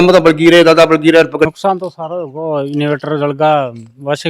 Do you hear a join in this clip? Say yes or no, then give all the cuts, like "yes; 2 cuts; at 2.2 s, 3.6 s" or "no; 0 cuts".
yes; 1 cut; at 1.5 s